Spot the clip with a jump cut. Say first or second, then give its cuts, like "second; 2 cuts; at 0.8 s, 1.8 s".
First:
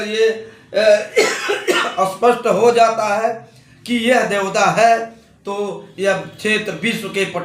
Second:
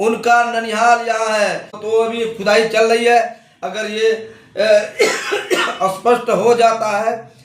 second; 1 cut; at 1.8 s